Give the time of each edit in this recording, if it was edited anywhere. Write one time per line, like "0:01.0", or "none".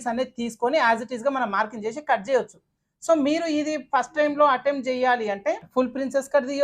0:05.7